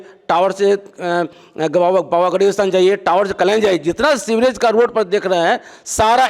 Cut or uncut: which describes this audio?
uncut